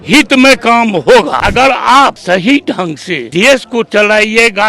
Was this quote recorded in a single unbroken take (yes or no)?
no